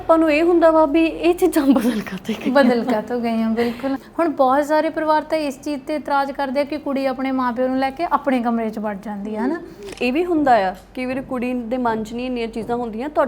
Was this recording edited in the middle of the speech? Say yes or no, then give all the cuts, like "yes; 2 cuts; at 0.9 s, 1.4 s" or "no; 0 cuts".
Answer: yes; 2 cuts; at 4.0 s, 9.9 s